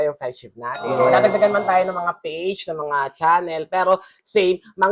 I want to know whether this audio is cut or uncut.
uncut